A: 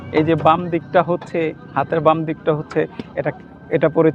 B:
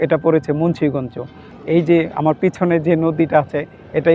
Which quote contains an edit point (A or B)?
B